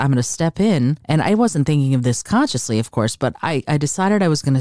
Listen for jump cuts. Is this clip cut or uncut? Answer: cut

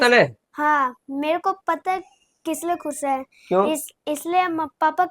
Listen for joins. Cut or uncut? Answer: uncut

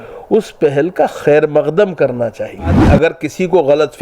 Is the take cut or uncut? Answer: cut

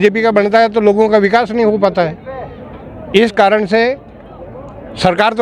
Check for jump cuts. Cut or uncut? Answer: uncut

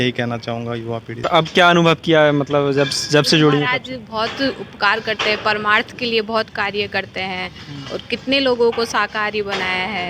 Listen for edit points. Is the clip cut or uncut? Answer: cut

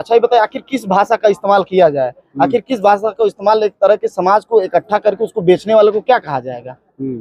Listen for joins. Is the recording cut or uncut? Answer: uncut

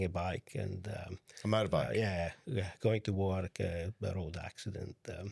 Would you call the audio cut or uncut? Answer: uncut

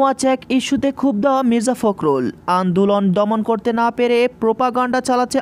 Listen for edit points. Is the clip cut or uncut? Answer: uncut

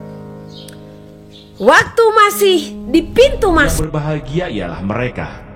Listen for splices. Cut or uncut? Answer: cut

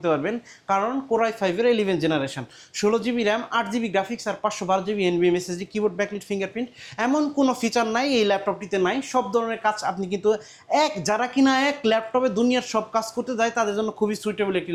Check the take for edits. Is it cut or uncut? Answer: uncut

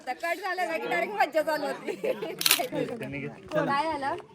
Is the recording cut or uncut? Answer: cut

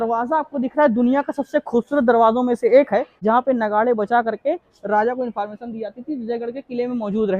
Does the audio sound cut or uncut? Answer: cut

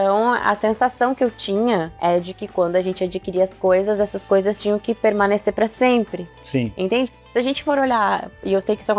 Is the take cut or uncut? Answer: uncut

